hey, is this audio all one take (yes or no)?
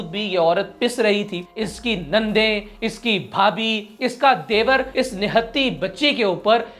no